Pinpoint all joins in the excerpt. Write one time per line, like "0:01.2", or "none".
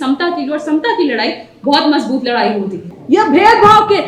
0:02.9